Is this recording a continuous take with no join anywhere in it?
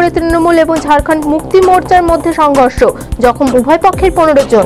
yes; 0 cuts

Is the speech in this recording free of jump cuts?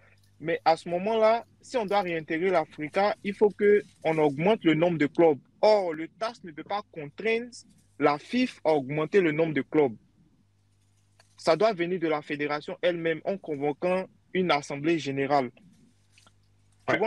yes; 0 cuts

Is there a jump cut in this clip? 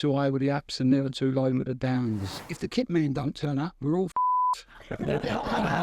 yes; 1 cut; at 2.5 s

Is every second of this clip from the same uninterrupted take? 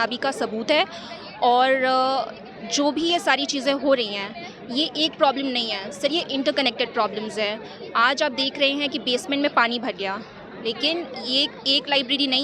yes; 0 cuts

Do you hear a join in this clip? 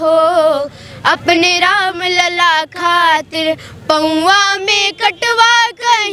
no; 0 cuts

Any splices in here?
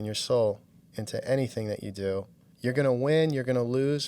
yes; 1 cut; at 2.4 s

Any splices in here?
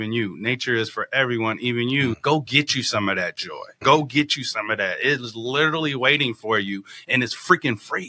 yes; 2 cuts; at 2.1 s, 3.8 s

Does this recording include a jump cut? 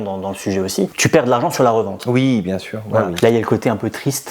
yes; 1 cut; at 3.1 s

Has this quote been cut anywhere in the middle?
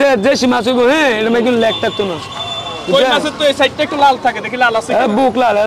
no; 0 cuts

